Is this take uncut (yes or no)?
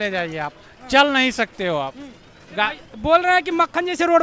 yes